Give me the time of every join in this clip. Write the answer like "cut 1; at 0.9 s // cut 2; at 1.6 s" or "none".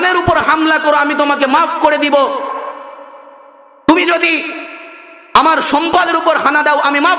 none